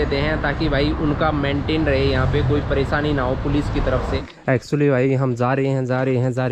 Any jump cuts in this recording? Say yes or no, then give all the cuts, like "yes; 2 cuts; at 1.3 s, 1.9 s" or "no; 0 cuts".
yes; 1 cut; at 4.3 s